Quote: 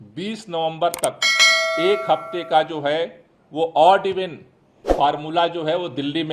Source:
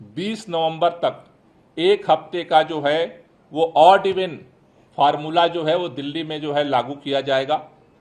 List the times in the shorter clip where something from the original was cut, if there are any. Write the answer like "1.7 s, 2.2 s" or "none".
none